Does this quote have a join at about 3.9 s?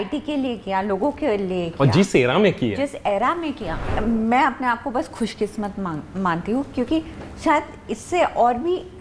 yes; 1 cut; at 3.9 s

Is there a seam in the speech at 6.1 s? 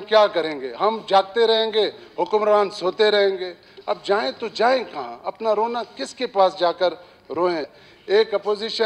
no; 1 cut; at 7.7 s

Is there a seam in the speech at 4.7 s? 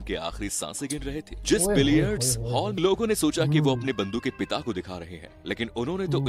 no; 1 cut; at 2.8 s

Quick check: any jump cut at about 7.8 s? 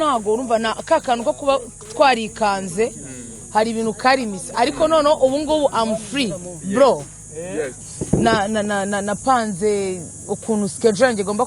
yes; 1 cut; at 7.8 s

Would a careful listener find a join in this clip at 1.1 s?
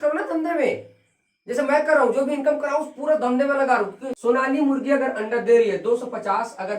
no; 1 cut; at 4.0 s

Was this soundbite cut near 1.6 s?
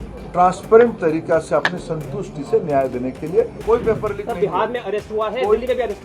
no; 1 cut; at 3.6 s

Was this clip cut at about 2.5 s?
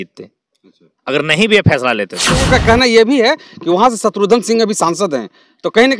yes; 1 cut; at 2.5 s

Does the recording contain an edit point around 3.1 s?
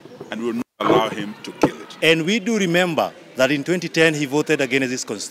no; 1 cut; at 1.9 s

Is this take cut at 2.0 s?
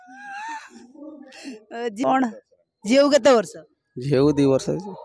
yes; 1 cut; at 2.0 s

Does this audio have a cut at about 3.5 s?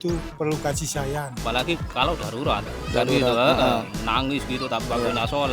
no; 1 cut; at 1.3 s

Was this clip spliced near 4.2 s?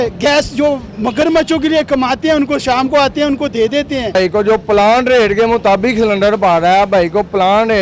yes; 1 cut; at 4.2 s

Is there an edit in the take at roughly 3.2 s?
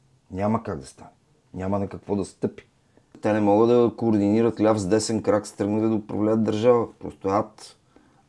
yes; 1 cut; at 3.2 s

